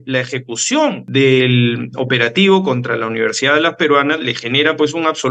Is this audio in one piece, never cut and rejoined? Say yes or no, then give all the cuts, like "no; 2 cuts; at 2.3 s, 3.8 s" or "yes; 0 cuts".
no; 1 cut; at 1.0 s